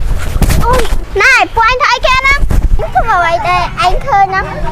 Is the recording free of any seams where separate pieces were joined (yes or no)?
no